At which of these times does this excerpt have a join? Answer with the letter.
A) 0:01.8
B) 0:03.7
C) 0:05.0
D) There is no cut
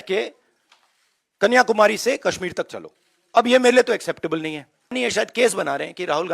C